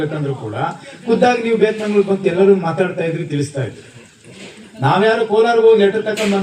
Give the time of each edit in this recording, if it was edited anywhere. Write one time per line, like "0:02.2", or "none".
none